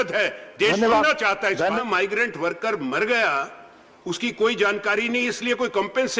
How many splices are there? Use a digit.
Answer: 1